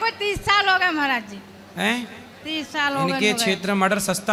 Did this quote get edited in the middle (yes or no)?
no